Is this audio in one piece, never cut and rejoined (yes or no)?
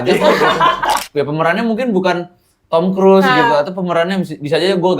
no